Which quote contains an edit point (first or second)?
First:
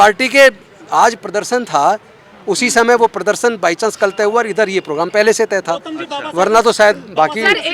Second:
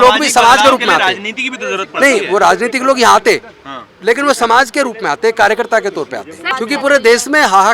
second